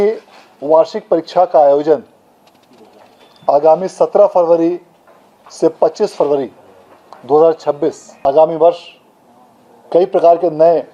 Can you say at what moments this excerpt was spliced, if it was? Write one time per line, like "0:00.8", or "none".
0:08.3